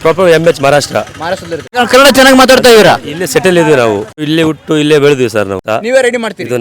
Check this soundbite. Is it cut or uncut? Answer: cut